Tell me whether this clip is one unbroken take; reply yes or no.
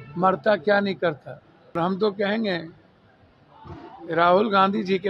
no